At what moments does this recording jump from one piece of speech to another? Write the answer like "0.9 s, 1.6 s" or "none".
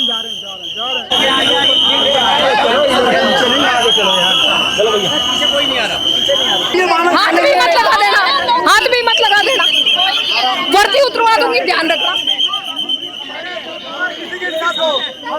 1.0 s, 6.7 s